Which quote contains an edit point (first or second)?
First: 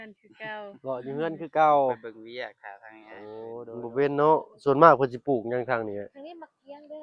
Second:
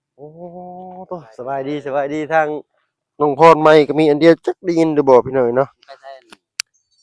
first